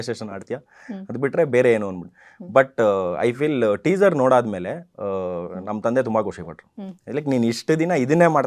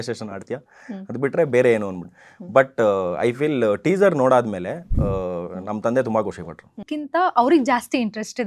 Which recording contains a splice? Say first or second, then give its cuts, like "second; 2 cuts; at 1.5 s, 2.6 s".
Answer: second; 1 cut; at 6.9 s